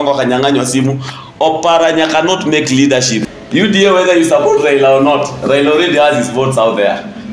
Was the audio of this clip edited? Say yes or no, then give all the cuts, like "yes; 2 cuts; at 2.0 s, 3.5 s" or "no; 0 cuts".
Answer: yes; 1 cut; at 3.3 s